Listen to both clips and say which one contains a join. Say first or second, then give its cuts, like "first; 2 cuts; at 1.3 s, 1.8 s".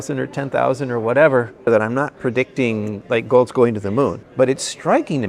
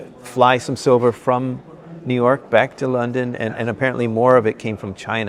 first; 2 cuts; at 1.5 s, 4.2 s